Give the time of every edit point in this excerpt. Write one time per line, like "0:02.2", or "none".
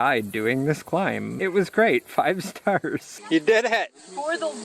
0:01.3
0:03.1